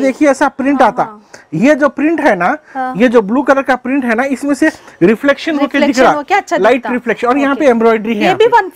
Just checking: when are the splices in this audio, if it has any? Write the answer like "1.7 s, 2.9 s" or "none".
none